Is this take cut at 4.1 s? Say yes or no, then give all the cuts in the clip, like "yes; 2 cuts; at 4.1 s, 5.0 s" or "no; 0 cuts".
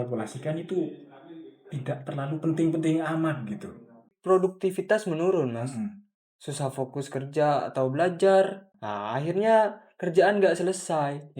yes; 2 cuts; at 4.1 s, 8.6 s